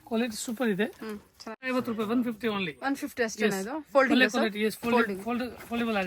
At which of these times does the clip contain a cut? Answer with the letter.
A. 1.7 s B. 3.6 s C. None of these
A